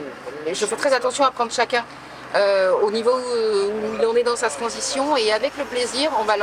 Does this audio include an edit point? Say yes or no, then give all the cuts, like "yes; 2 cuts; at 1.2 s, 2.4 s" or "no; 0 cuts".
no; 0 cuts